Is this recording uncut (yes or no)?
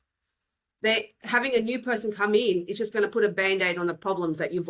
yes